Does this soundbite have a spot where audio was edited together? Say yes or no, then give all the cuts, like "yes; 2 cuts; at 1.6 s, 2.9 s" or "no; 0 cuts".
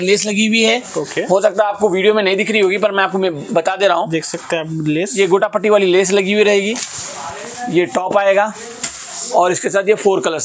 no; 0 cuts